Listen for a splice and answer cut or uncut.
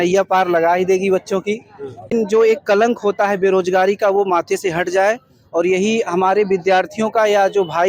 cut